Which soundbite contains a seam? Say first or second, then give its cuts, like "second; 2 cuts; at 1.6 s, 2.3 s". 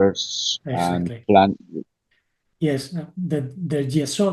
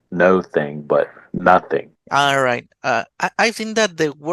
second; 1 cut; at 2.0 s